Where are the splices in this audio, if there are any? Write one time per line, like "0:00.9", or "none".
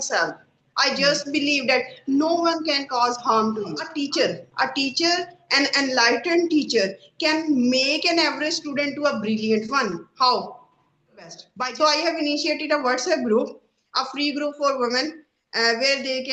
0:03.9
0:11.5